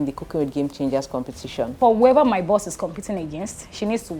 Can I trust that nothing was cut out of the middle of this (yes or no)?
no